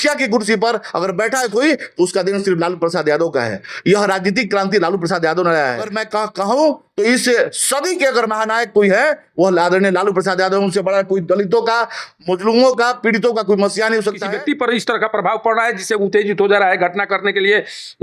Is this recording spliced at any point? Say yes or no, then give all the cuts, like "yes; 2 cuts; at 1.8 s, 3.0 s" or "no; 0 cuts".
yes; 2 cuts; at 5.9 s, 14.3 s